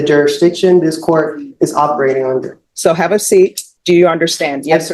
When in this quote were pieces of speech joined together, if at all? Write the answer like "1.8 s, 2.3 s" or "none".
2.6 s, 3.7 s